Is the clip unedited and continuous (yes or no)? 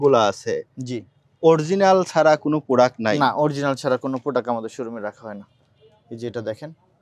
yes